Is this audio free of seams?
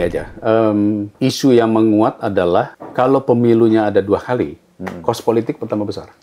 no; 2 cuts; at 1.1 s, 2.8 s

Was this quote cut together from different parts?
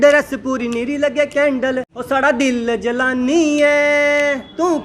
yes; 1 cut; at 1.9 s

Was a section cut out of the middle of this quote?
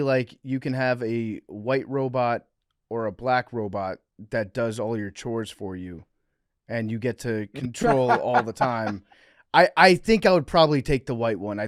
no; 0 cuts

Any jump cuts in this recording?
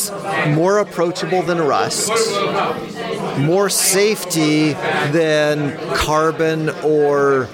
no; 0 cuts

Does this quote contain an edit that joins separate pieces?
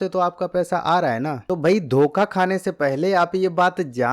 yes; 1 cut; at 1.4 s

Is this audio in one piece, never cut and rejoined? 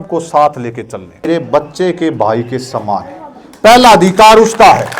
no; 1 cut; at 1.3 s

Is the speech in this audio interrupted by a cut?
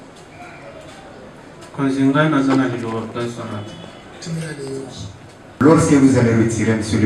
yes; 1 cut; at 5.6 s

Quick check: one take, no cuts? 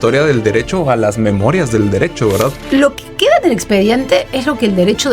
no; 1 cut; at 2.5 s

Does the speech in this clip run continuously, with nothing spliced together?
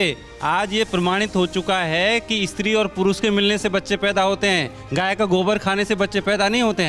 yes; 0 cuts

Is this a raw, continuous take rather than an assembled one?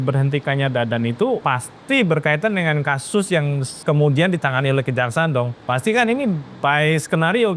no; 3 cuts; at 1.4 s, 3.7 s, 5.6 s

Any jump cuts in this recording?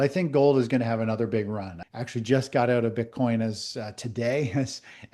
yes; 1 cut; at 1.8 s

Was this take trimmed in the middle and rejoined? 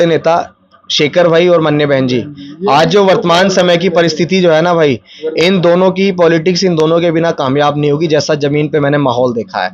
no; 0 cuts

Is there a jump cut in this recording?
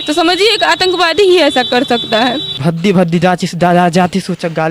yes; 1 cut; at 2.5 s

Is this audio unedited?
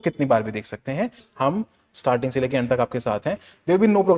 no; 1 cut; at 1.3 s

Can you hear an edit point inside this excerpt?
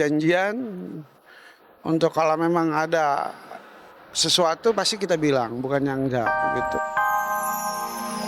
yes; 1 cut; at 6.3 s

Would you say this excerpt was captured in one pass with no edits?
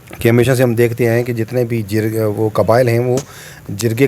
yes; 0 cuts

